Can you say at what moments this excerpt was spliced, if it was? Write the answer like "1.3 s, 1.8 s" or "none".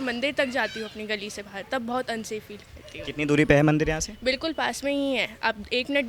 none